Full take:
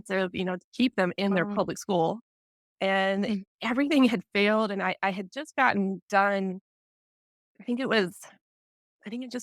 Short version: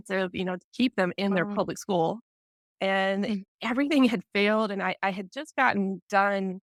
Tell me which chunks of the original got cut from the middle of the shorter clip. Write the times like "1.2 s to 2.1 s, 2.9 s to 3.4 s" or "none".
none